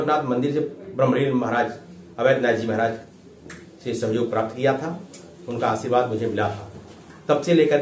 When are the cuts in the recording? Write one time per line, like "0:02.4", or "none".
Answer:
none